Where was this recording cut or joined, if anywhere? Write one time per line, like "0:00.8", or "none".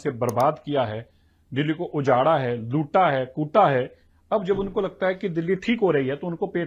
none

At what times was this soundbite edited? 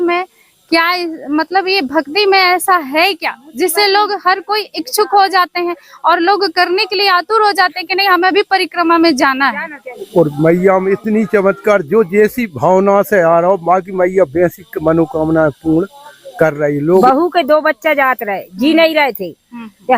0:10.0
0:17.0

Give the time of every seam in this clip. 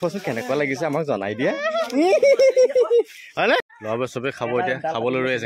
0:03.7

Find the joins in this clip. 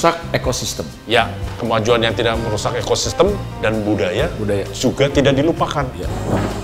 none

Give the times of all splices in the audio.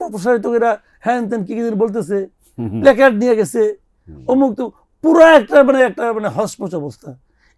none

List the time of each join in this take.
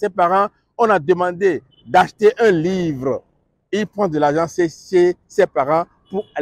none

